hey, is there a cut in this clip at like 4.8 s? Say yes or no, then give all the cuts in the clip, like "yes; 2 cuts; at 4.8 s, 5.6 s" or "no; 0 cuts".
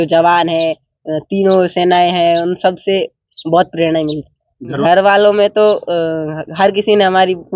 yes; 1 cut; at 4.8 s